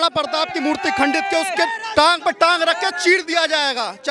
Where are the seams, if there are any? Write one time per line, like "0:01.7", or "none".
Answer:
none